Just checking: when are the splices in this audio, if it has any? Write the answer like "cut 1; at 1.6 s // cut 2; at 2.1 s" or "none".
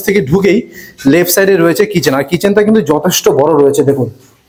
none